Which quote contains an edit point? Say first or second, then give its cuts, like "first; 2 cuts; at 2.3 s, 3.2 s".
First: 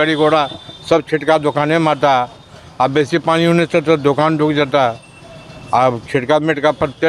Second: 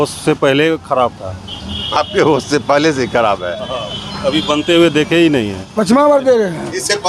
second; 1 cut; at 5.6 s